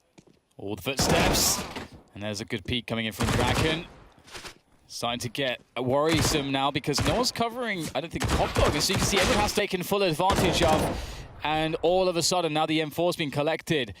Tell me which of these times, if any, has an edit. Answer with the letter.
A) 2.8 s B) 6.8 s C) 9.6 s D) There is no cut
C